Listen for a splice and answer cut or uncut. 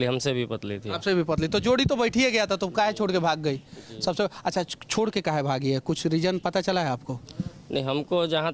uncut